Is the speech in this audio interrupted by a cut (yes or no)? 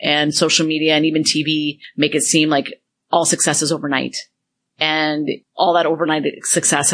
yes